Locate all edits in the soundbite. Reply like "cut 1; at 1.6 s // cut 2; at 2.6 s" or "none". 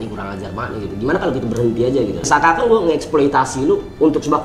cut 1; at 2.2 s